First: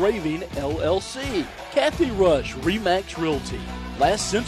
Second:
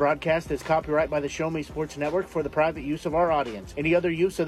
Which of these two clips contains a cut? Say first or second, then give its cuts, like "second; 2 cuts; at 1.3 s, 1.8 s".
first; 1 cut; at 1.6 s